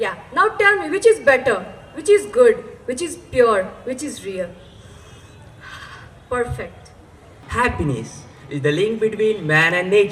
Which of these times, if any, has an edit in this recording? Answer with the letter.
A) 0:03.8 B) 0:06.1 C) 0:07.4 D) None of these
C